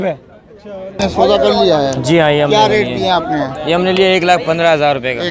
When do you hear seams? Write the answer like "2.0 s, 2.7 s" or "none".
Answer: 1.0 s